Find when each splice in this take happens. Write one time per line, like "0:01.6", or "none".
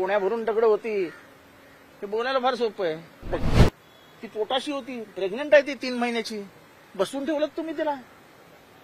0:03.4